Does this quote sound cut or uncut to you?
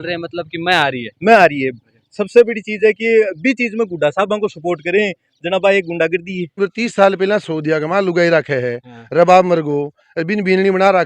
cut